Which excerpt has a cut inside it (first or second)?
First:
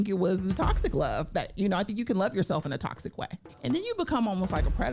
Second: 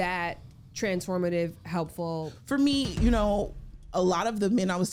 first